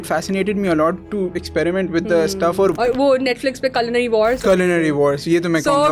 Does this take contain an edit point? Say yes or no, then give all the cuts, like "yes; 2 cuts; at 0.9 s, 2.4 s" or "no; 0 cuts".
yes; 2 cuts; at 2.8 s, 4.4 s